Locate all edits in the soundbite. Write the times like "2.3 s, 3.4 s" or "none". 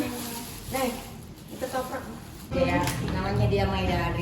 2.6 s